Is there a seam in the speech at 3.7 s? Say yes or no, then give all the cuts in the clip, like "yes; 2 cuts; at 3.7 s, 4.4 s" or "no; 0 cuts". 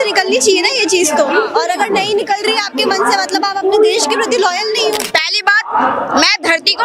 no; 1 cut; at 5.1 s